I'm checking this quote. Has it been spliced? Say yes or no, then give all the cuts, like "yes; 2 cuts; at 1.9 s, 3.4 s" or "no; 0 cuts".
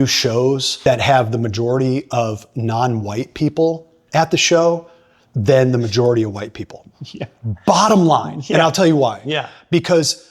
no; 0 cuts